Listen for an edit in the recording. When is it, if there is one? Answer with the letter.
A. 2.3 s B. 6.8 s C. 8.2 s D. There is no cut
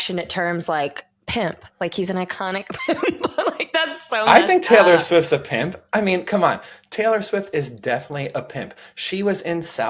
D